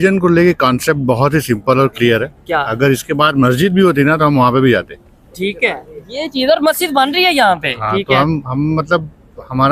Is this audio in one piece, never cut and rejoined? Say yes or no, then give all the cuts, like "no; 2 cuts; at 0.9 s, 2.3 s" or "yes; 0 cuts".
yes; 0 cuts